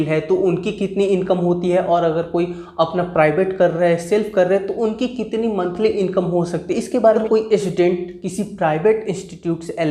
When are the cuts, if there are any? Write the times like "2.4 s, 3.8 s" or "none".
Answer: 7.2 s